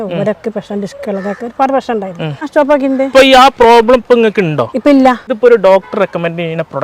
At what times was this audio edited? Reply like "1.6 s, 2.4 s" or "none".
2.5 s, 5.3 s